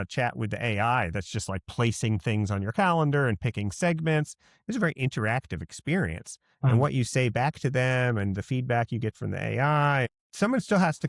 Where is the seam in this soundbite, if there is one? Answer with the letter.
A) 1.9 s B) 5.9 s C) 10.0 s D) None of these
C